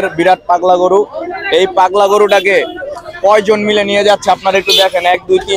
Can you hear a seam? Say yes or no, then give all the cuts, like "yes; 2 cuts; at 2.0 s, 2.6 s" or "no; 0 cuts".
no; 0 cuts